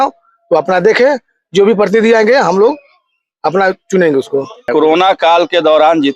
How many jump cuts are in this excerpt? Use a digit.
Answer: 1